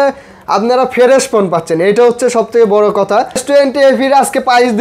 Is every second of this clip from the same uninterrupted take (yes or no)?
no